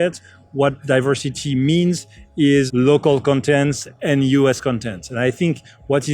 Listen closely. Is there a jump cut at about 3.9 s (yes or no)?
no